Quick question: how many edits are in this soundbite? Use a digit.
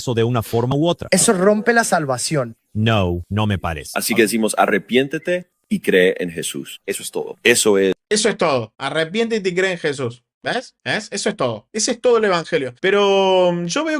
1